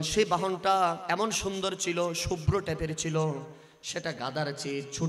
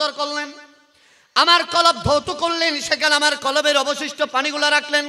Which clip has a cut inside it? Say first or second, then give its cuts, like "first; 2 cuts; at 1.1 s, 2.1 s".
first; 1 cut; at 1.0 s